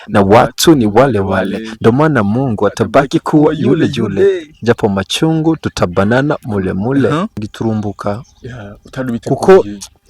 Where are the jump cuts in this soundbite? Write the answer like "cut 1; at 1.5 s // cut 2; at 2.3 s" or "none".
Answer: cut 1; at 7.5 s